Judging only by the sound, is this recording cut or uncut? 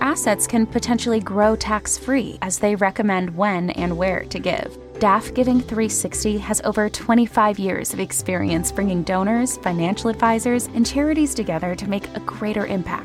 uncut